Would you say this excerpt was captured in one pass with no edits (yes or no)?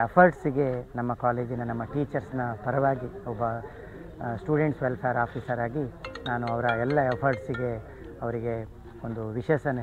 yes